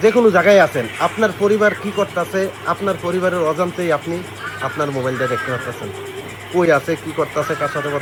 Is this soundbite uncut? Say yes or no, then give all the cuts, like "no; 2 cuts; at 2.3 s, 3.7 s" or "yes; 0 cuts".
yes; 0 cuts